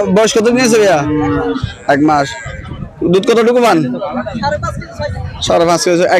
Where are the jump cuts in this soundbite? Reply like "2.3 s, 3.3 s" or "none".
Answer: none